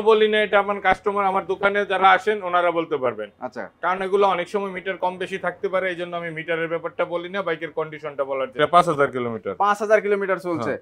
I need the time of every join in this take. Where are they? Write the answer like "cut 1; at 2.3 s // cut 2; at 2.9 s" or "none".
cut 1; at 8.6 s